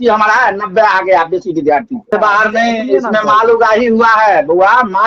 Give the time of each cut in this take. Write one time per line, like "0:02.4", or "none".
0:02.1

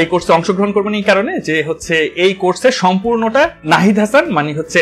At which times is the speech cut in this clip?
0:03.6

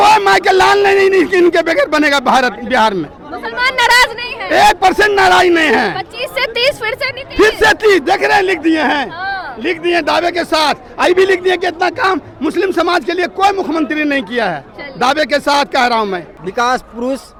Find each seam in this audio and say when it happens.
none

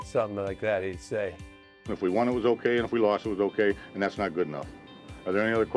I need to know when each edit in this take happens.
0:01.8

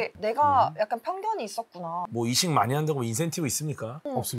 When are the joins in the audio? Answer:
0:02.1

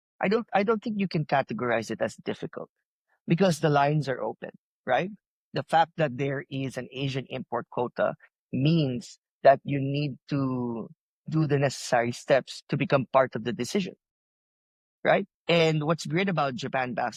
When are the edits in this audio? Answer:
none

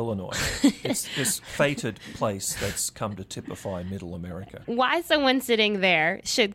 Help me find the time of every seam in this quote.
0:04.6

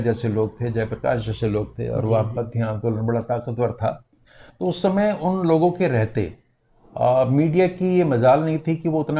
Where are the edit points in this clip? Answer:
none

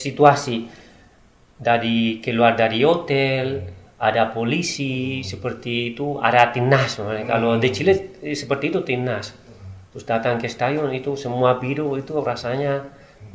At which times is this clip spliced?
none

